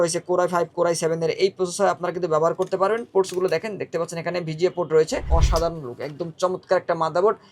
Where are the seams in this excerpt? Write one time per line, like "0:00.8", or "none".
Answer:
0:05.3